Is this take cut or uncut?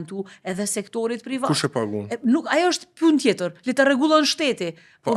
uncut